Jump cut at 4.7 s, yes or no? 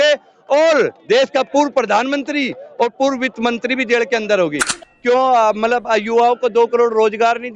yes